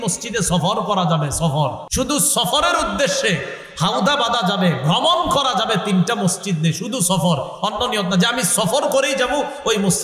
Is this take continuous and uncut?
no; 1 cut; at 1.8 s

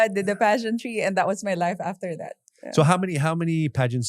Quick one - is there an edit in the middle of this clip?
no; 0 cuts

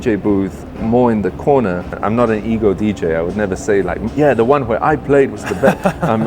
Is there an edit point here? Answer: yes; 1 cut; at 2.0 s

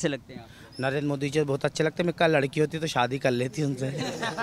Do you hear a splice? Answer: no; 0 cuts

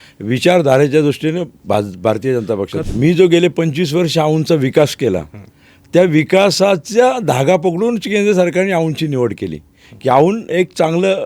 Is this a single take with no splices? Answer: no; 1 cut; at 2.8 s

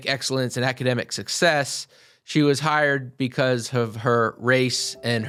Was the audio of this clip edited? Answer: no; 0 cuts

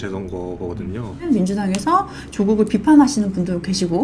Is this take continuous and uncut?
no; 1 cut; at 1.2 s

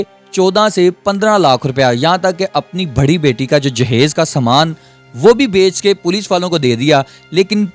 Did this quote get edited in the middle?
no; 0 cuts

